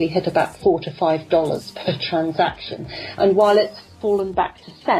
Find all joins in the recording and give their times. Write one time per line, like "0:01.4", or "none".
0:03.9